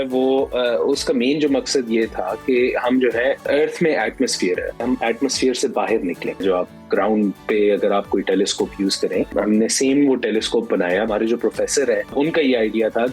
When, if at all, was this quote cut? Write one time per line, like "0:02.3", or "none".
0:03.4
0:04.8
0:06.4
0:09.3
0:11.1
0:12.1